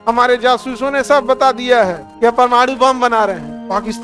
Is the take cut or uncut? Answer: cut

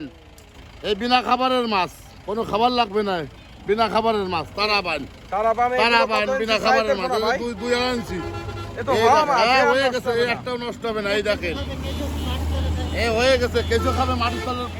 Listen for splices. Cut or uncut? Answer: uncut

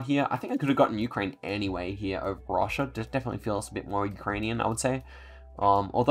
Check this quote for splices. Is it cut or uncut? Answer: uncut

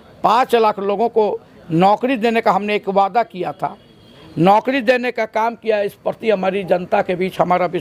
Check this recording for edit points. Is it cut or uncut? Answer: uncut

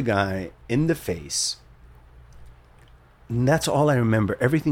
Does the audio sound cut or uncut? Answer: uncut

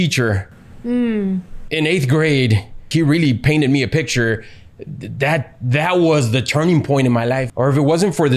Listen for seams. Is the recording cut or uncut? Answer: cut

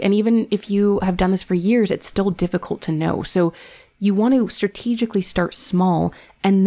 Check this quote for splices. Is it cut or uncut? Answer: uncut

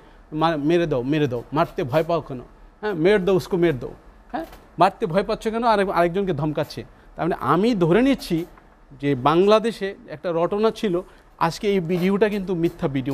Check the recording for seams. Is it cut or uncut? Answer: uncut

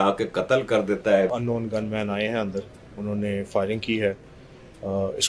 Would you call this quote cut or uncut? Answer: cut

